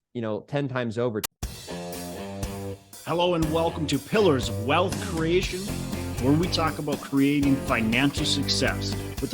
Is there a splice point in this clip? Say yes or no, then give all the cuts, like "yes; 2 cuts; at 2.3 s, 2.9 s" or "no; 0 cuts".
yes; 1 cut; at 1.3 s